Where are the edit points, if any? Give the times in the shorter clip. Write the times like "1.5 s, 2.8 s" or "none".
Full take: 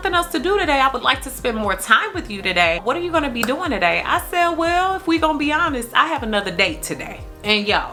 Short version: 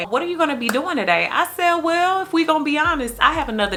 none